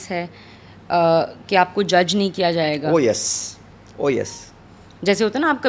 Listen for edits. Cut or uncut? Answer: uncut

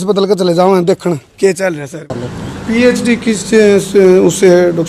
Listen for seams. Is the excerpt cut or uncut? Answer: cut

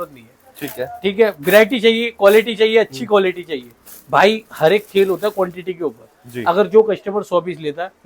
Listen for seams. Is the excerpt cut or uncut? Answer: uncut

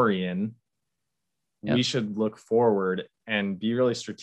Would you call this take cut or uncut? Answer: uncut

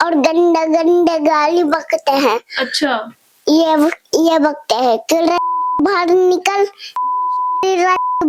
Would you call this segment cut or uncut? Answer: uncut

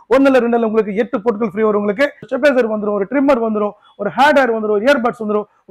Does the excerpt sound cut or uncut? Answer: cut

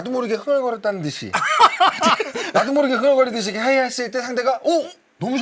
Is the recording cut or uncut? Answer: cut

